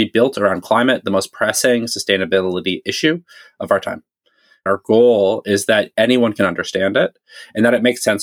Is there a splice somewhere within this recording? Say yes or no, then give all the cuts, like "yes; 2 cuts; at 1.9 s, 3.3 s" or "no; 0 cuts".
yes; 1 cut; at 4.6 s